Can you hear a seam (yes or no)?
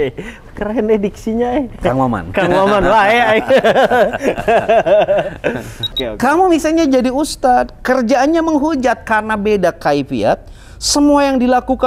yes